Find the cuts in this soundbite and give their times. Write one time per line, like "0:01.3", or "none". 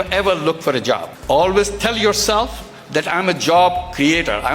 0:01.1